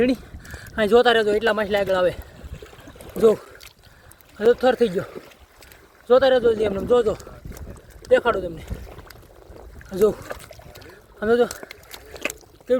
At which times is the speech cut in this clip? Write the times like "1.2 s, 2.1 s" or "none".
none